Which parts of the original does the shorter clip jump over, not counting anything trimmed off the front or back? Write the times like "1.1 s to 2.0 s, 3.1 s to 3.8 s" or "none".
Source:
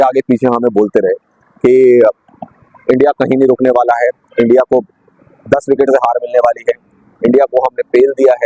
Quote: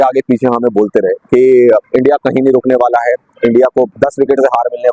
1.2 s to 1.5 s, 2.2 s to 2.8 s, 4.9 s to 5.4 s